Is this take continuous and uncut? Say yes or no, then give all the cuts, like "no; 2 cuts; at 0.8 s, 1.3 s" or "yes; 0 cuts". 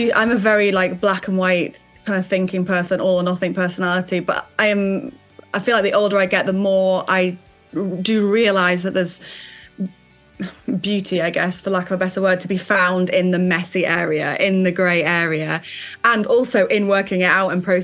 yes; 0 cuts